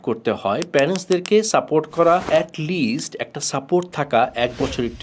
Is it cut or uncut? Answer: cut